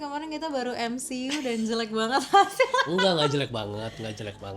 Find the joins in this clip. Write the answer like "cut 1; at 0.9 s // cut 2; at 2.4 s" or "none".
none